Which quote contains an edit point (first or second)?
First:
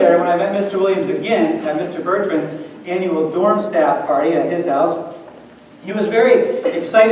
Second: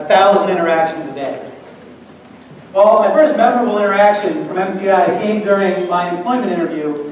first